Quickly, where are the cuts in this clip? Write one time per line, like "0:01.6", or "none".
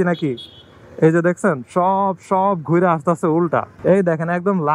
none